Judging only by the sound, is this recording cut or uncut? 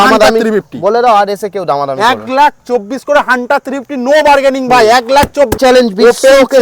cut